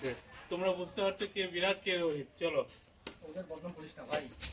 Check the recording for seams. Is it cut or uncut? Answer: uncut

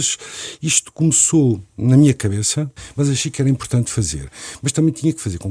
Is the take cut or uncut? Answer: cut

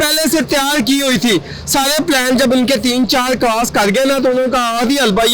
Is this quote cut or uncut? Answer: uncut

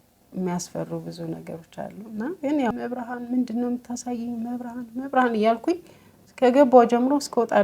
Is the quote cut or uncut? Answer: cut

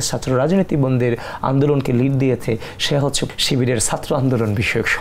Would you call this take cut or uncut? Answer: cut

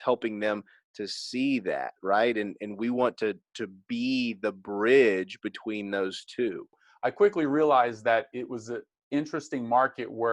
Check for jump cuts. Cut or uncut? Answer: cut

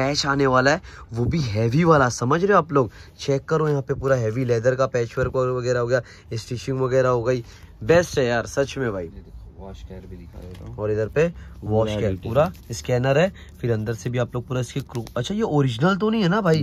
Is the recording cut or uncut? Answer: uncut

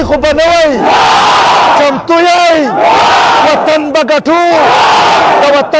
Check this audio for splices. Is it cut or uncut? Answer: uncut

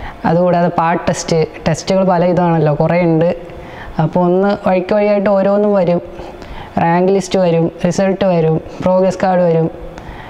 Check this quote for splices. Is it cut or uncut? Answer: uncut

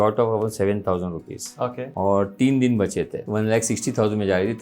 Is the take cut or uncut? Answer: cut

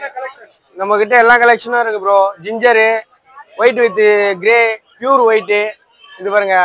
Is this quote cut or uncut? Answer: uncut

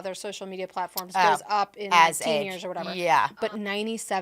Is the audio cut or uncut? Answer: cut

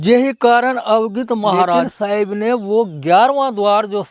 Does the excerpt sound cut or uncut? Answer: cut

